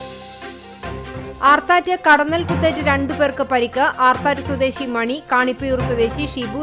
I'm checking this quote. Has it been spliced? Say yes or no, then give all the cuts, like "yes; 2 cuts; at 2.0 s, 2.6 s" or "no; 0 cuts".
yes; 1 cut; at 1.3 s